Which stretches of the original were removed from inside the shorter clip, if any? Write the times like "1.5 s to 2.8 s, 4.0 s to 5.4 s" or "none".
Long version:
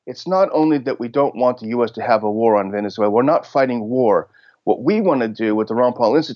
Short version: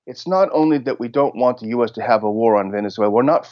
none